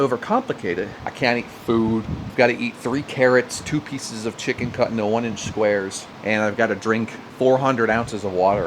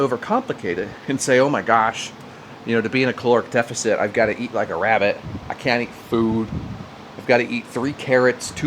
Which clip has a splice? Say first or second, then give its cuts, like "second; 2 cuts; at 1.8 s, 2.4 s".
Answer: first; 2 cuts; at 0.9 s, 2.2 s